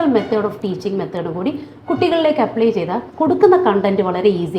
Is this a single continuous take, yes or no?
yes